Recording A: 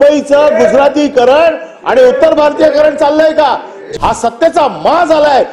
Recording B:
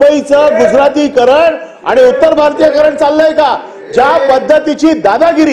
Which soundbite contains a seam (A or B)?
A